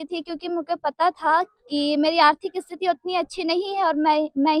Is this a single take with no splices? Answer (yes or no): yes